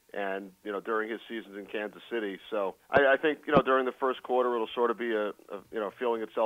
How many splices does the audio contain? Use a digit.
1